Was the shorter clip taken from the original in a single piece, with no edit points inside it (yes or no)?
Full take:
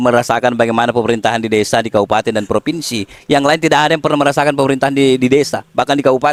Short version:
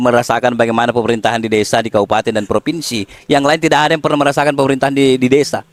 yes